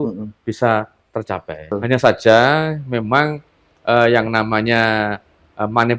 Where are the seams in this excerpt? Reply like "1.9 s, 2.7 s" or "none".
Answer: 1.7 s